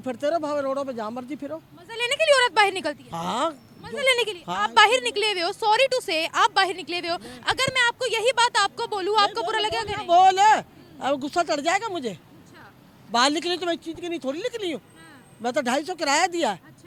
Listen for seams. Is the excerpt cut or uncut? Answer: uncut